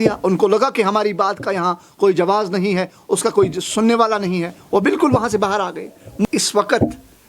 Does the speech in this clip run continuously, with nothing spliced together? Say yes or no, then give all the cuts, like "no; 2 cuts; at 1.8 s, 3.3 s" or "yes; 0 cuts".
no; 1 cut; at 6.2 s